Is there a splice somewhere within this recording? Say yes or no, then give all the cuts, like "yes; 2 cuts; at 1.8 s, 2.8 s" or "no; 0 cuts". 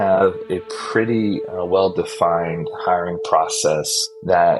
no; 0 cuts